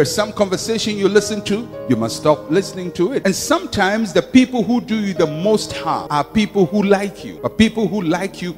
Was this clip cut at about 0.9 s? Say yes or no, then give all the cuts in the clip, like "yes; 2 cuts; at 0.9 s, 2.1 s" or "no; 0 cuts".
no; 3 cuts; at 3.2 s, 6.0 s, 7.2 s